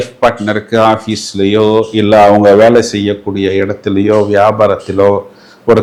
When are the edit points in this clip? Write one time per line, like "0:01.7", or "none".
none